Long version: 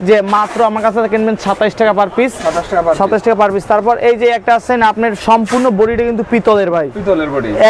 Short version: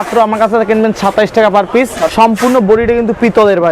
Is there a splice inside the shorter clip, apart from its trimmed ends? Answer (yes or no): yes